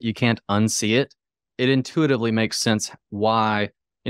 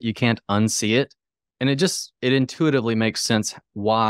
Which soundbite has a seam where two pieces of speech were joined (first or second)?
first